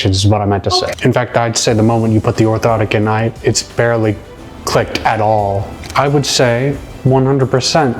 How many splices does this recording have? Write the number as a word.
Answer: two